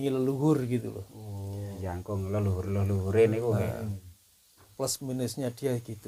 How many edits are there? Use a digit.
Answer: 2